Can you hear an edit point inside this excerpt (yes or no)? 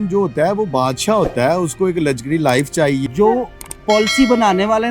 yes